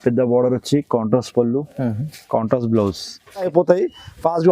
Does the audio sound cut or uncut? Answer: cut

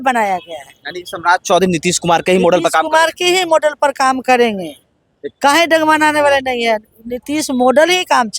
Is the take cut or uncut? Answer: uncut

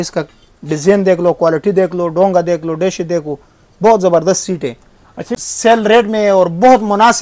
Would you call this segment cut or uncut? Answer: cut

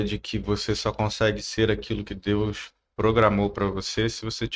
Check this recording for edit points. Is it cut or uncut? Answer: uncut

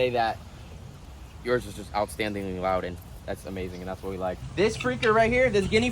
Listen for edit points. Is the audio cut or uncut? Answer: cut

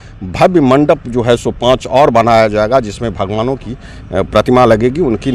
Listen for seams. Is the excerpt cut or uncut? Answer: uncut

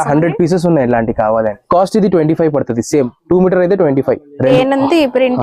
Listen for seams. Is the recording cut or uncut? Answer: cut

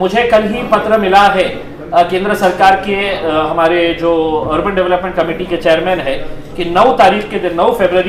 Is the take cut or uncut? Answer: uncut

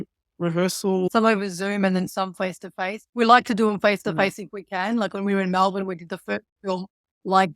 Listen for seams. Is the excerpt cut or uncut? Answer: cut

